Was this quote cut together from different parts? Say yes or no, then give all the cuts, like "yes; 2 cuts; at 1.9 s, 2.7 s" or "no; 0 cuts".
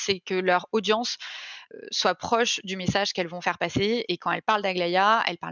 yes; 1 cut; at 1.6 s